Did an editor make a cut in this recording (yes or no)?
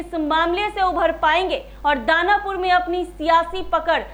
no